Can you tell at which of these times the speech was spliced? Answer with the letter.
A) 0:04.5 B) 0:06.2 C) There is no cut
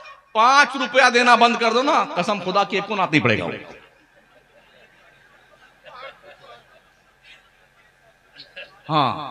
C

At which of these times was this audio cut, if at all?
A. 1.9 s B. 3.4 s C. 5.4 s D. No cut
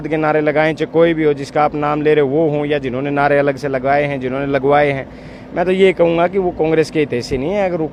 D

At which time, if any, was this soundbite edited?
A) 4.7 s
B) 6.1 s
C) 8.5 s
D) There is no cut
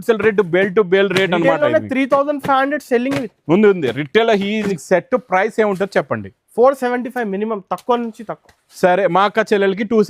A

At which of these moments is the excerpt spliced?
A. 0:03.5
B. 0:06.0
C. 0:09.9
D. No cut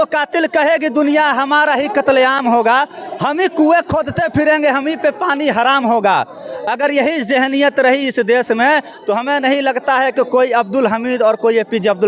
D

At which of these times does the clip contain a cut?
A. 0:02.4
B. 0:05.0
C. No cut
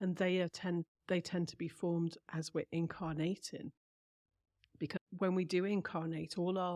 B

